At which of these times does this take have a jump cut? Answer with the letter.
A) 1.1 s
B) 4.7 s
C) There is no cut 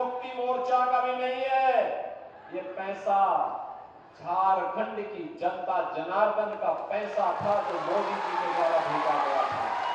C